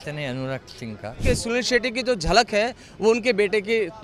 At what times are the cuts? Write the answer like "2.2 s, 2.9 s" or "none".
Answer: 1.2 s